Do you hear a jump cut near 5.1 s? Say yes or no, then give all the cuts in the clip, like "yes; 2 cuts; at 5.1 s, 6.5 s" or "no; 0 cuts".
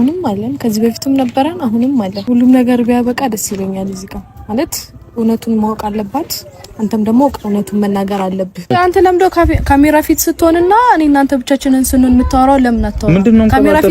no; 2 cuts; at 2.2 s, 8.7 s